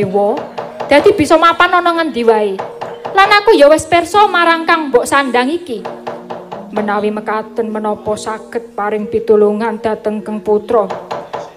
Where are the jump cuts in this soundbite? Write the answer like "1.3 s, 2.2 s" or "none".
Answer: none